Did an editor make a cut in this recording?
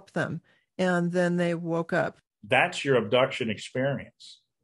yes; 1 cut; at 2.2 s

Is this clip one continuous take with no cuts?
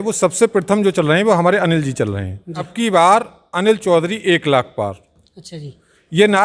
no; 1 cut; at 2.7 s

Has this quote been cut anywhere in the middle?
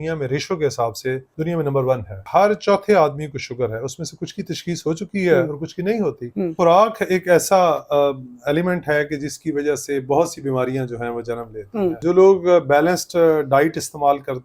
yes; 4 cuts; at 1.3 s, 2.2 s, 6.5 s, 12.0 s

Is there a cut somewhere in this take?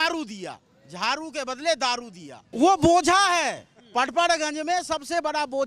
yes; 1 cut; at 2.4 s

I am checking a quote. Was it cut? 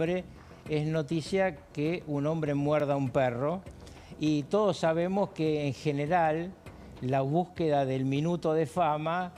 no; 0 cuts

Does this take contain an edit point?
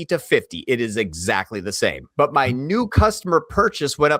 yes; 1 cut; at 2.0 s

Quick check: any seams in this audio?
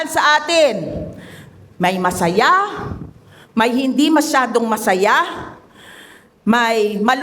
no; 0 cuts

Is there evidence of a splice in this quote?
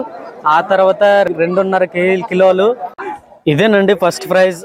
yes; 2 cuts; at 1.3 s, 2.9 s

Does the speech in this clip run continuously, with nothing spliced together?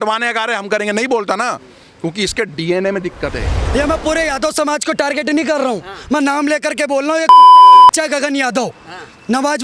no; 1 cut; at 3.5 s

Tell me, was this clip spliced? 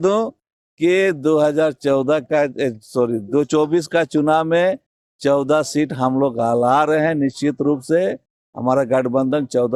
no; 0 cuts

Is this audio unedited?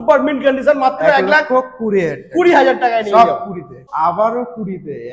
no; 1 cut; at 3.8 s

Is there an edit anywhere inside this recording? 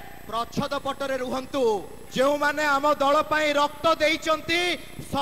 yes; 1 cut; at 2.0 s

